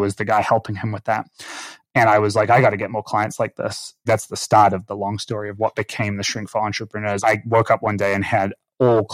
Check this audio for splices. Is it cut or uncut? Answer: cut